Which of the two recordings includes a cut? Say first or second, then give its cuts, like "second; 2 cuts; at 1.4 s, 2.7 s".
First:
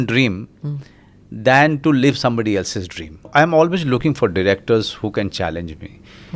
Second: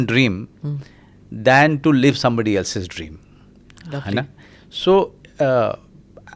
first; 1 cut; at 3.3 s